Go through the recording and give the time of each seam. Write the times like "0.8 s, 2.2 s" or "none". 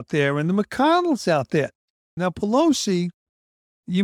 2.1 s